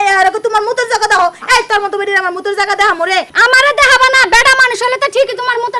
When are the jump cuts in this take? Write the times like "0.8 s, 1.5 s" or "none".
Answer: 3.3 s